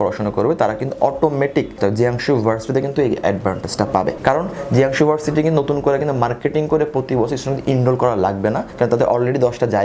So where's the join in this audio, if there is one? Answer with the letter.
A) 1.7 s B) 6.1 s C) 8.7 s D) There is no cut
A